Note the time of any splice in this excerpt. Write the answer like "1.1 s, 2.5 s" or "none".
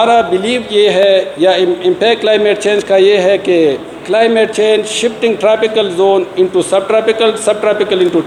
none